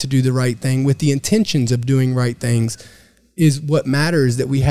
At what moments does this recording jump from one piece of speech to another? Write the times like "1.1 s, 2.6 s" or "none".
none